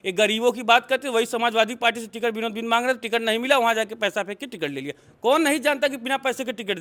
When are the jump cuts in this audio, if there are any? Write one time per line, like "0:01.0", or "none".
none